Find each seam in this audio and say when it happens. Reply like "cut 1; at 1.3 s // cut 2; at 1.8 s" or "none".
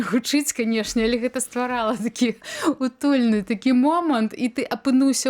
none